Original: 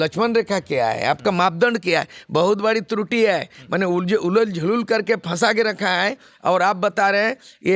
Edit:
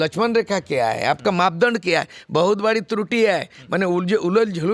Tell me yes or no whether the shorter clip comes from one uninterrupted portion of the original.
yes